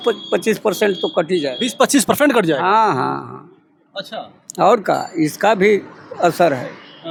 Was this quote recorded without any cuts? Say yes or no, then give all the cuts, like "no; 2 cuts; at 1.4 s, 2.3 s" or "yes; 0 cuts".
yes; 0 cuts